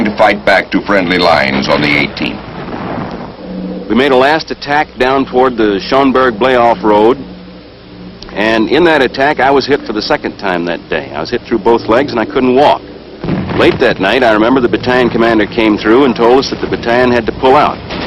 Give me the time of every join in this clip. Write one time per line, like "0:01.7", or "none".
0:05.9